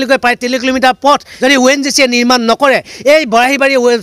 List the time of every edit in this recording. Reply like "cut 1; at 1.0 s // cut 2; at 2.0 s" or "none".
cut 1; at 1.3 s